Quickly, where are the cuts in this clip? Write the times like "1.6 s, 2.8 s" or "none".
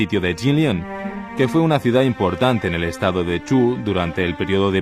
3.7 s